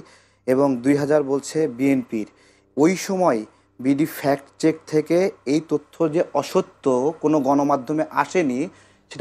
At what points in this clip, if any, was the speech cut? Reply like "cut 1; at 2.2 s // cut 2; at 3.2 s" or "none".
none